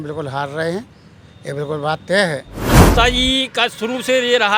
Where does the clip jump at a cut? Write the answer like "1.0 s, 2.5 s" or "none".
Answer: 2.8 s